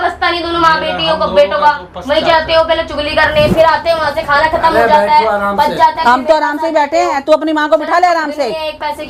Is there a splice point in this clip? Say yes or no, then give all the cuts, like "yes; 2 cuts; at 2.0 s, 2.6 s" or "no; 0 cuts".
no; 0 cuts